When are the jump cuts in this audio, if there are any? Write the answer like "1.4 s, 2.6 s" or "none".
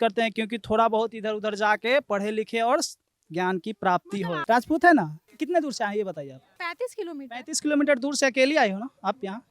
4.4 s, 5.3 s